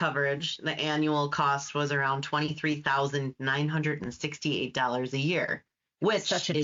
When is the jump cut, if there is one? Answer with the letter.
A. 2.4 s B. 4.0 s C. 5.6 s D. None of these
D